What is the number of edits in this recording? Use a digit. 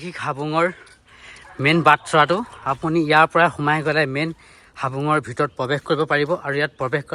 0